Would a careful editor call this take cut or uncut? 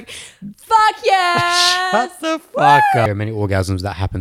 cut